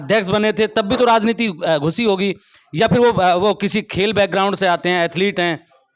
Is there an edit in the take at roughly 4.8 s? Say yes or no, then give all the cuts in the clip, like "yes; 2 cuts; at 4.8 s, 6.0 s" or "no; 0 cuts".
no; 0 cuts